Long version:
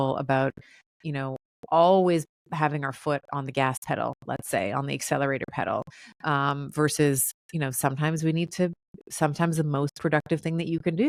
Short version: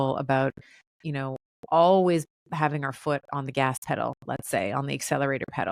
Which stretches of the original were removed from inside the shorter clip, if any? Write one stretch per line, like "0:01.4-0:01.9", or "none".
none